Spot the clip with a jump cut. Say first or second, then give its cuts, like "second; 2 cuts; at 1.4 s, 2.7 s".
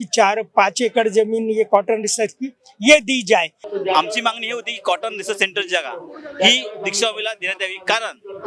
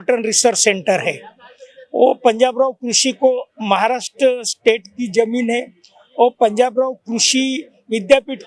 first; 1 cut; at 3.6 s